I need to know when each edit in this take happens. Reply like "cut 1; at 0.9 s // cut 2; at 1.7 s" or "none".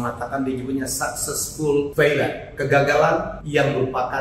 cut 1; at 1.9 s // cut 2; at 3.4 s